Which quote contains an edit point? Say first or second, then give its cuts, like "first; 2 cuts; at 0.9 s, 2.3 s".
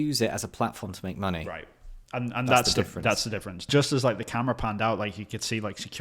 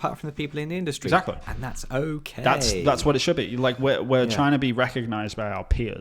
first; 1 cut; at 3.7 s